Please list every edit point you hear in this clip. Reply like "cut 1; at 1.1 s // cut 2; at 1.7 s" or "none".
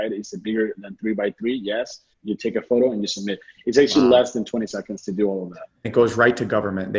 cut 1; at 2.2 s // cut 2; at 5.9 s